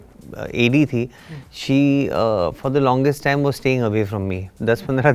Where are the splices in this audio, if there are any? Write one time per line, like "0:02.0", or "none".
none